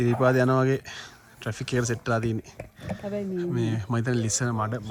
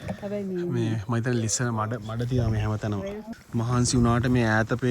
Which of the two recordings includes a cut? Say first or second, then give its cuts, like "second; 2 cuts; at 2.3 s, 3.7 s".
second; 1 cut; at 3.3 s